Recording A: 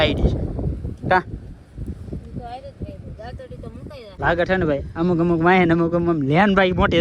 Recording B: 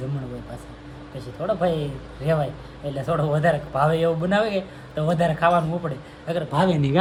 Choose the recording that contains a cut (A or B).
A